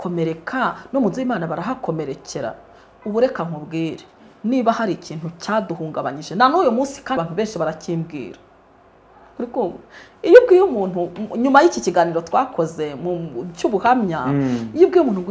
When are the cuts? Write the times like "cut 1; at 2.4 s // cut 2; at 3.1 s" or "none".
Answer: cut 1; at 7.2 s